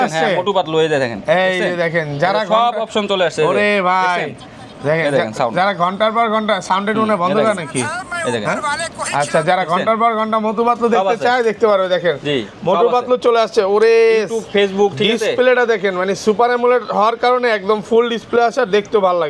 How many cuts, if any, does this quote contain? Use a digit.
0